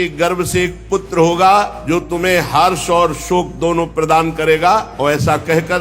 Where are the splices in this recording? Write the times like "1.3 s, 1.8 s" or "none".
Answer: 1.8 s, 4.9 s